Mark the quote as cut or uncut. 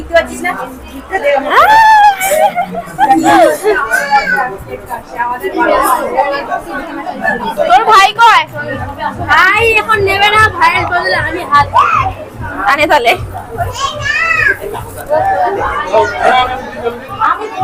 uncut